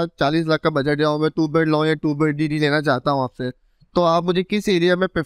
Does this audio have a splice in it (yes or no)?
no